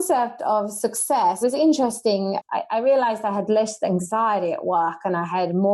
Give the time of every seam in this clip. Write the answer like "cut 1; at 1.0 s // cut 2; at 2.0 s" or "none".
cut 1; at 1.4 s // cut 2; at 2.4 s